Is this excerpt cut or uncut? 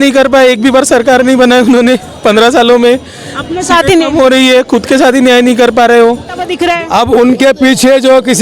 cut